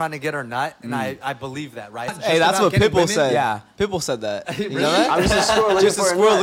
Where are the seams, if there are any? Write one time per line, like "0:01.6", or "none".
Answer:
0:02.1